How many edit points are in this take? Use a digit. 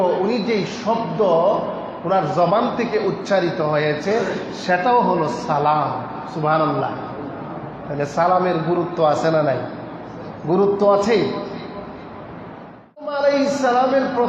1